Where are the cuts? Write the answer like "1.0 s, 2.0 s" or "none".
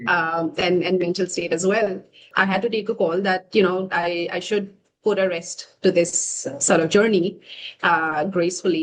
2.3 s